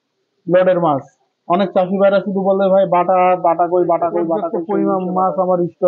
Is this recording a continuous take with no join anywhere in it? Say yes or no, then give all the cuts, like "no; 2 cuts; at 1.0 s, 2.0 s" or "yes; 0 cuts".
no; 1 cut; at 4.6 s